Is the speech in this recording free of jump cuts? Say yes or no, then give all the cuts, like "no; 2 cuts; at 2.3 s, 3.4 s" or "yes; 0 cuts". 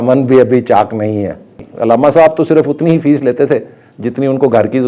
no; 1 cut; at 1.6 s